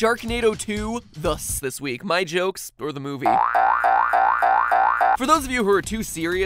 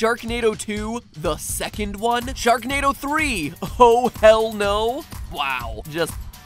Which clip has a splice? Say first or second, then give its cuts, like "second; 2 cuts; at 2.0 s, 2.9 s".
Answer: second; 1 cut; at 1.6 s